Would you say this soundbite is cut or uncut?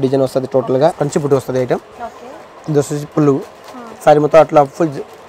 cut